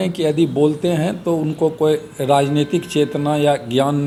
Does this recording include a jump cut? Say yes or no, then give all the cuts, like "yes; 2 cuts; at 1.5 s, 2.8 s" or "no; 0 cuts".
no; 0 cuts